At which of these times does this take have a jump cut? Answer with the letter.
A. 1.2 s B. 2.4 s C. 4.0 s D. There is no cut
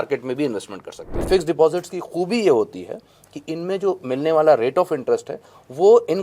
A